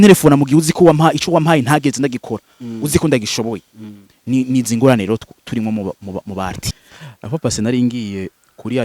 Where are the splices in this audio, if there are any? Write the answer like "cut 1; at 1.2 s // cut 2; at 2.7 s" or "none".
cut 1; at 6.7 s